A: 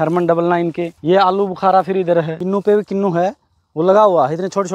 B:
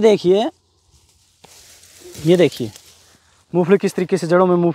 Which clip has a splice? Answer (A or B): A